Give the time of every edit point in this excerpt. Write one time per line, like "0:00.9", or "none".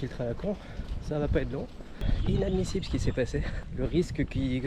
0:02.1
0:03.6